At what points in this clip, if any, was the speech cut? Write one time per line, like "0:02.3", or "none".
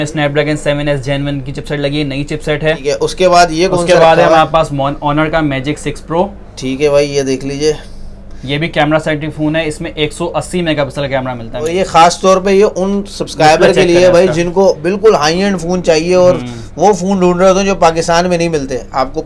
0:02.8
0:11.7